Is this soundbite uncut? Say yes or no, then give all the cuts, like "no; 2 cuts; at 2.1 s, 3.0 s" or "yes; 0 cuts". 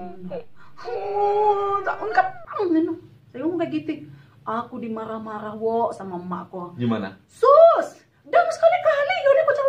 yes; 0 cuts